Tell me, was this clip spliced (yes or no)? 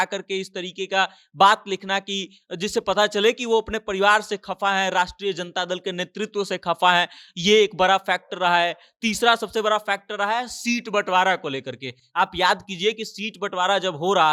no